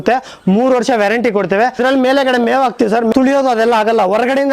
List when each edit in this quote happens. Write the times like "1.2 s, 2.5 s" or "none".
1.8 s, 3.1 s